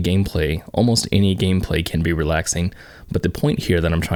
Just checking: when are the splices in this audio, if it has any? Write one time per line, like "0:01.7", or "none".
none